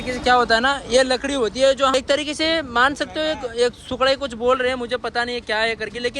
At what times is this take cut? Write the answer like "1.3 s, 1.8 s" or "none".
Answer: 1.9 s